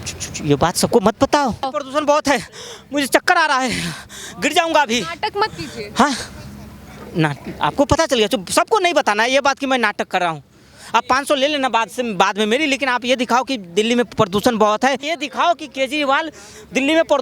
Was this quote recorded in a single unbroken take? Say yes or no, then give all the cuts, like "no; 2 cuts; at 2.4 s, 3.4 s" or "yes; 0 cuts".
no; 2 cuts; at 1.8 s, 15.0 s